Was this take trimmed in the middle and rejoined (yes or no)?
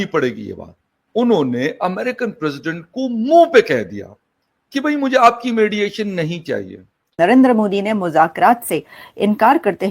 yes